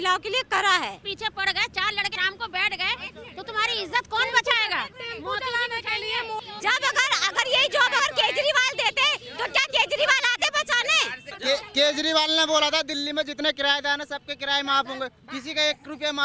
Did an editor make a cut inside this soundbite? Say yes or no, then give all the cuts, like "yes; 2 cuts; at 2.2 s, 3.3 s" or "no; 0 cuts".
yes; 4 cuts; at 1.1 s, 2.1 s, 6.4 s, 11.3 s